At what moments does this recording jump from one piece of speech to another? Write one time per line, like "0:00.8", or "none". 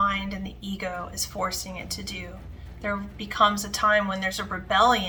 none

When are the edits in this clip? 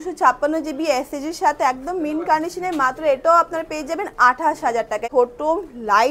0:05.0

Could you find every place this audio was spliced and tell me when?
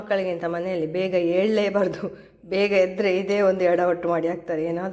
none

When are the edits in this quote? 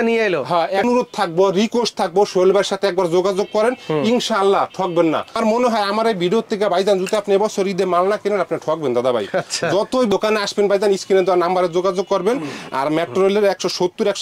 0:00.8
0:05.4
0:10.1

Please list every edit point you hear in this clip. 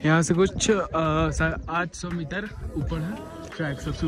none

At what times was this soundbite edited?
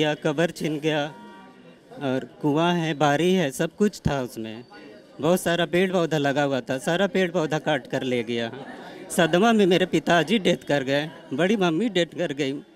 none

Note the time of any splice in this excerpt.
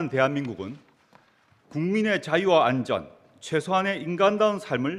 none

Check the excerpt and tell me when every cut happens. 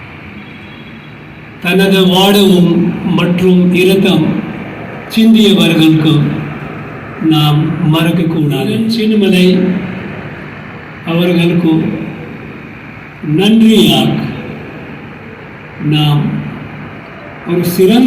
0:08.7

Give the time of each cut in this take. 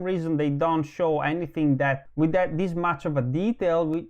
0:02.0

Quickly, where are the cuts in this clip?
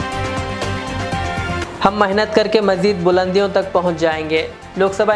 0:01.6

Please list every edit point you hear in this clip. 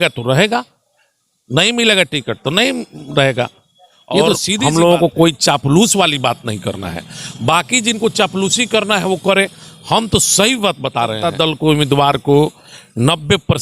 0:04.6
0:11.3

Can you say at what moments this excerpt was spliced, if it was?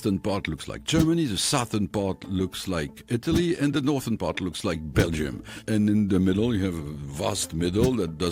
0:03.0
0:05.6

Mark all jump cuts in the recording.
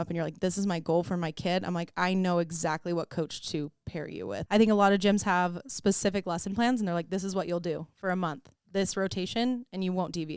0:04.4

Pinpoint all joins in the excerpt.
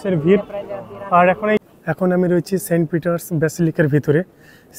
0:01.7

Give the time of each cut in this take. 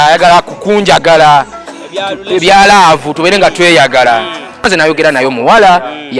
0:04.7

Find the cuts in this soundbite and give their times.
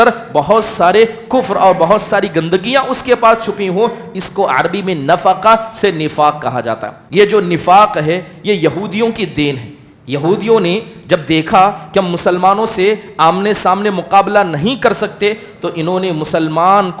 0:06.9

